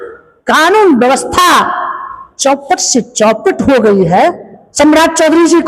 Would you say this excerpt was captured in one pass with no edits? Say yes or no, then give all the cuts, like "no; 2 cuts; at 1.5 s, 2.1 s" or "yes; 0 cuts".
no; 1 cut; at 4.6 s